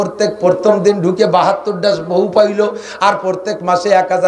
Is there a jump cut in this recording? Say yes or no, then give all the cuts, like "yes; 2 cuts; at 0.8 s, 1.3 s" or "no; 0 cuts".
no; 0 cuts